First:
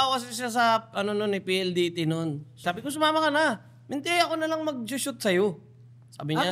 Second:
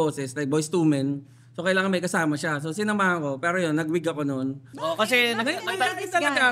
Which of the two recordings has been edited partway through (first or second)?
second